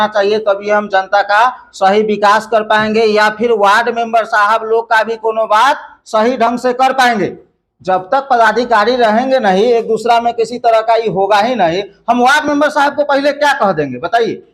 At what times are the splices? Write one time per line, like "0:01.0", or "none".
none